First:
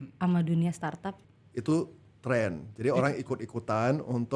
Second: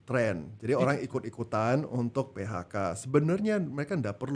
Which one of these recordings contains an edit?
first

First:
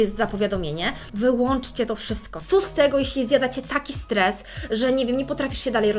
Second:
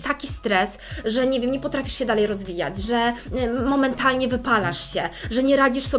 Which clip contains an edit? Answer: first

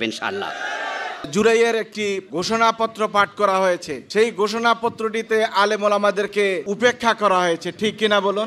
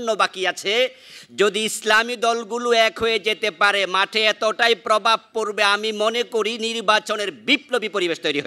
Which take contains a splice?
first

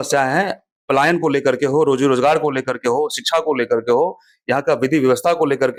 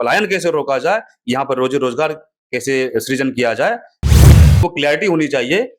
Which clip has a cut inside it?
second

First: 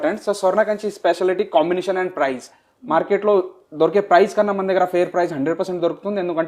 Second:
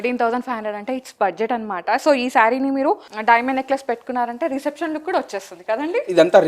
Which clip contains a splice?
second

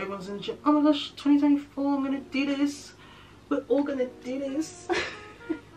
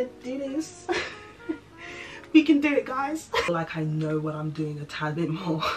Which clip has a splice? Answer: second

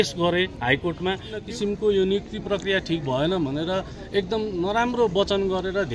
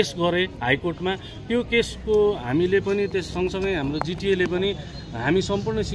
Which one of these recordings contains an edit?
first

